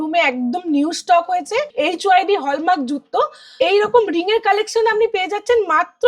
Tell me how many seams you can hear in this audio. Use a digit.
2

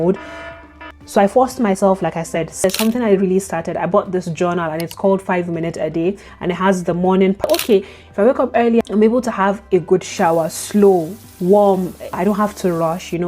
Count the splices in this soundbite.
3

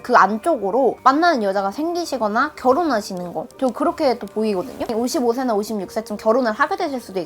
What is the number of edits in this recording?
1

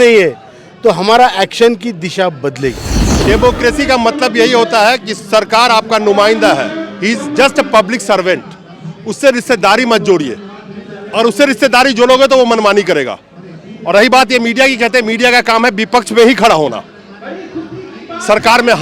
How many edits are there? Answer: 1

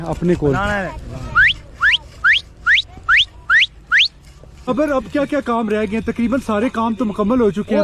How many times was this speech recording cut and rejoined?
1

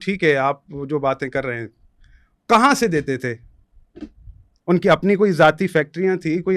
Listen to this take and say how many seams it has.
0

